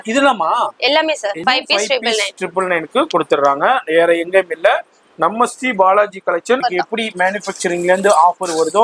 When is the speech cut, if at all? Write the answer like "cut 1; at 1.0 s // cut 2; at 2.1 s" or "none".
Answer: cut 1; at 1.4 s // cut 2; at 6.6 s

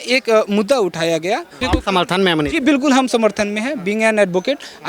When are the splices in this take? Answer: cut 1; at 1.6 s

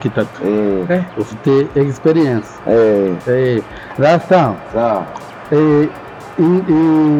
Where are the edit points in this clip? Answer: none

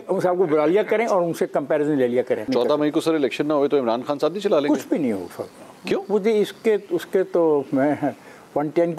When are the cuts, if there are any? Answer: cut 1; at 2.5 s

